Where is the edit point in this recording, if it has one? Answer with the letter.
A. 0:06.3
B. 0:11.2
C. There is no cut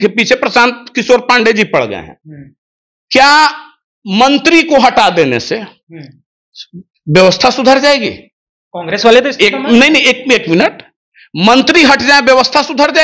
C